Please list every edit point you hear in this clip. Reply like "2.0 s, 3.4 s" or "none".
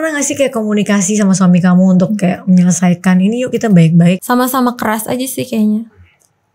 4.2 s